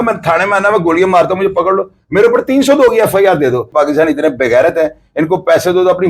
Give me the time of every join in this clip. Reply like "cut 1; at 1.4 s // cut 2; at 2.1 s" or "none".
cut 1; at 3.7 s

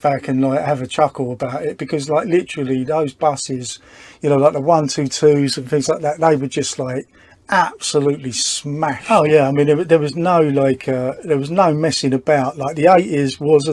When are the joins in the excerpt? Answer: cut 1; at 9.0 s

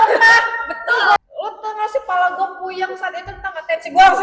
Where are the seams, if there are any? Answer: cut 1; at 1.2 s

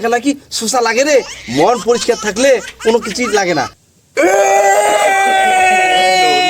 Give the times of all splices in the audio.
cut 1; at 3.8 s

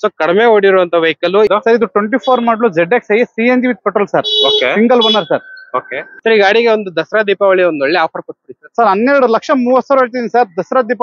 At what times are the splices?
cut 1; at 1.5 s // cut 2; at 6.1 s

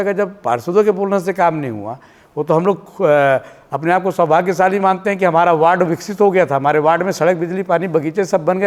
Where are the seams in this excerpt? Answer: none

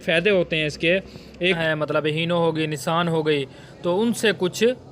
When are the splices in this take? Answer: cut 1; at 1.6 s

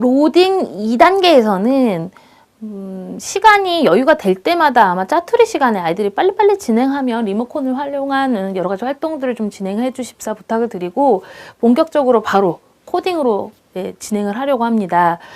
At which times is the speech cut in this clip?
cut 1; at 0.9 s

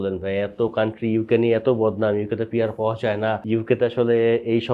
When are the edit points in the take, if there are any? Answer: cut 1; at 3.4 s

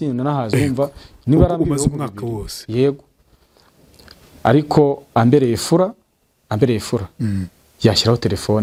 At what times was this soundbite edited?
none

